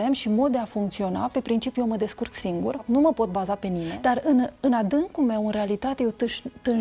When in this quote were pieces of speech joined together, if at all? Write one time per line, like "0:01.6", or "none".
0:02.8
0:03.9